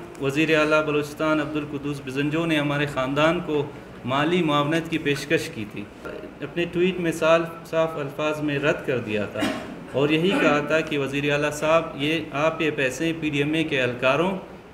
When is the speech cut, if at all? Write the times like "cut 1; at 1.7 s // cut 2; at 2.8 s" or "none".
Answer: cut 1; at 6.2 s

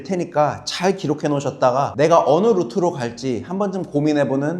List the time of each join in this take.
cut 1; at 1.9 s

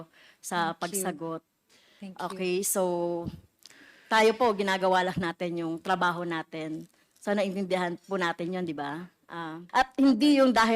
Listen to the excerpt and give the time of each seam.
cut 1; at 9.6 s

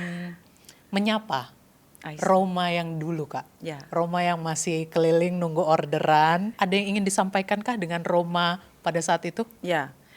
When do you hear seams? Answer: cut 1; at 6.5 s

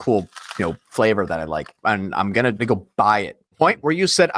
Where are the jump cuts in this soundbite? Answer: cut 1; at 1.8 s // cut 2; at 2.6 s // cut 3; at 3.4 s

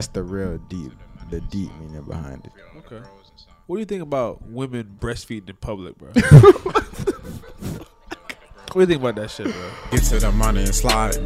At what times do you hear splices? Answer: cut 1; at 9.7 s

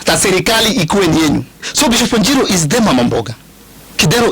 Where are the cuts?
cut 1; at 1.6 s

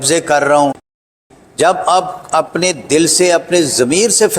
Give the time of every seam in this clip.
cut 1; at 1.0 s

